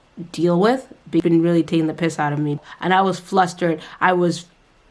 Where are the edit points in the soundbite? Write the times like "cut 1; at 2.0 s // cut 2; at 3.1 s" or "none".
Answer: cut 1; at 1.2 s // cut 2; at 2.6 s